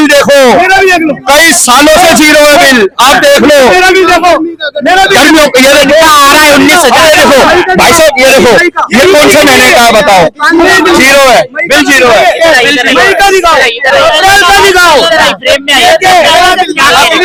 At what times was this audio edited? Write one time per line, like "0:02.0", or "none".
none